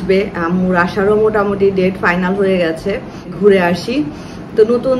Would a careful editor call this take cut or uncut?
cut